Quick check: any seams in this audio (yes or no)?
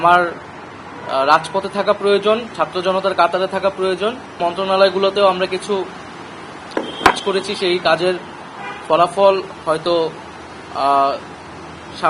yes